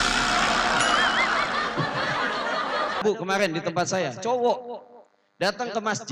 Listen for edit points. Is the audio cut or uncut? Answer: cut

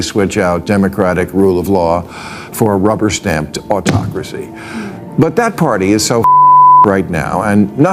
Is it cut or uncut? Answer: uncut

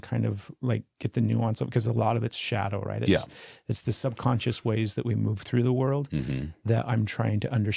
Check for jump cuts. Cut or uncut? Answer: uncut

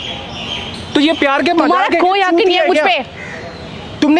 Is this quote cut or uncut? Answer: uncut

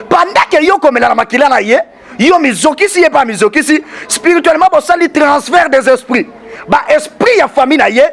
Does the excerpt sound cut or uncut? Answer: cut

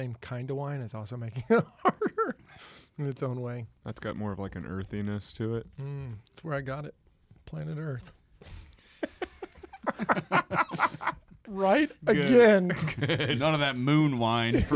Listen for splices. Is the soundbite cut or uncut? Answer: cut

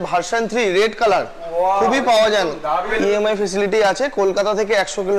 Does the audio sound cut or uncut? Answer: cut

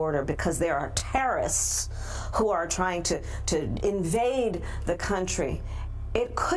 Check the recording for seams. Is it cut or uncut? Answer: uncut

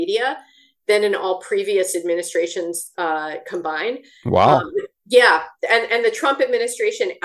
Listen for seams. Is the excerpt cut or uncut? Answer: uncut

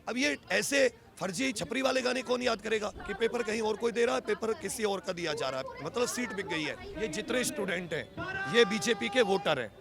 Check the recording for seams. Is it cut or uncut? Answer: cut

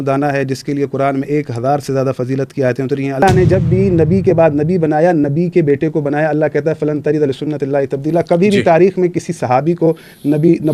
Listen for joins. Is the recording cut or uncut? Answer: cut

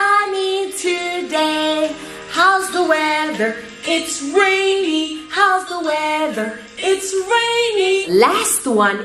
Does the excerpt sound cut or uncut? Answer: cut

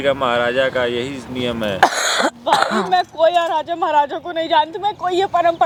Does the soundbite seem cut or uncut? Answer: uncut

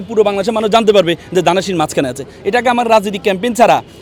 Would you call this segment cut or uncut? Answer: uncut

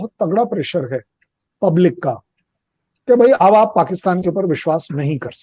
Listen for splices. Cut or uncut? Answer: uncut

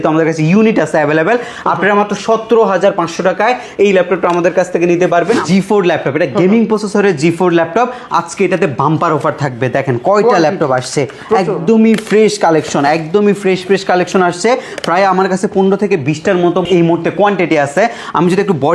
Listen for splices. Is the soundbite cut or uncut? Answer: cut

